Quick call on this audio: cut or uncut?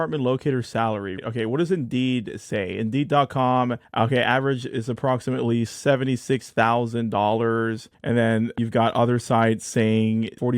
cut